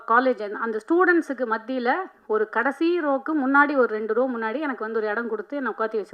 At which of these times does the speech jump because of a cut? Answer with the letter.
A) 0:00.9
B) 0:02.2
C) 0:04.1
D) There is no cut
D